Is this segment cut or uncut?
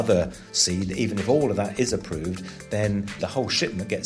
cut